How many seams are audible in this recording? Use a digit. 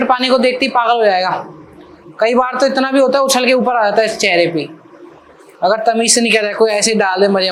0